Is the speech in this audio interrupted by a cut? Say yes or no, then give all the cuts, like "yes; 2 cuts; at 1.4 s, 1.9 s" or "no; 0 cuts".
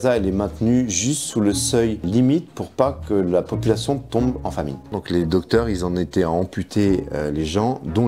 yes; 2 cuts; at 2.0 s, 4.9 s